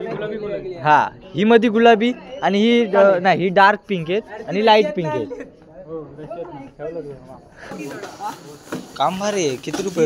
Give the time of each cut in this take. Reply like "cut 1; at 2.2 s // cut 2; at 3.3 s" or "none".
cut 1; at 7.8 s